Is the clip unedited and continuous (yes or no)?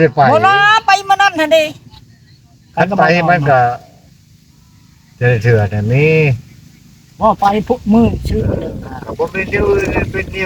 yes